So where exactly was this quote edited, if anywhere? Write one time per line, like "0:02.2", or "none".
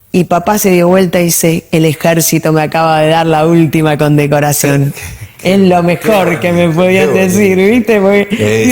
none